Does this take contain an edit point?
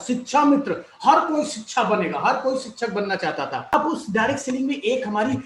yes; 1 cut; at 3.7 s

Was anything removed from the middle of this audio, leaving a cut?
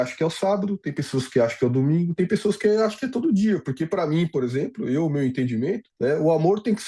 yes; 1 cut; at 5.9 s

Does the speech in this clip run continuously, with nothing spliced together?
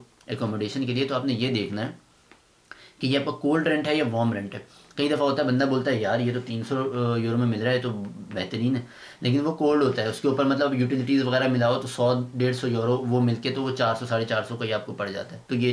yes; 0 cuts

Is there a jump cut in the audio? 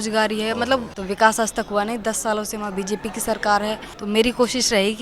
yes; 2 cuts; at 0.9 s, 3.9 s

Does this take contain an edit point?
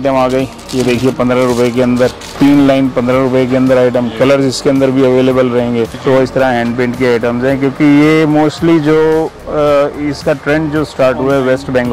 yes; 2 cuts; at 2.4 s, 6.0 s

